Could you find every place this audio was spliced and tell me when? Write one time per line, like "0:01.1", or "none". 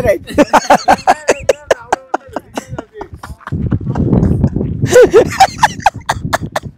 none